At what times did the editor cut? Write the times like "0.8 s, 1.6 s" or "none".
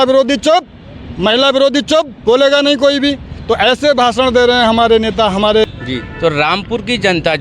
5.6 s